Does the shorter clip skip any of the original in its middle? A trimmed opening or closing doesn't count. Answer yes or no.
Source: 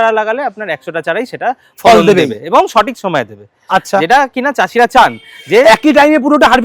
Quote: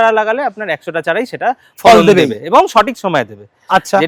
no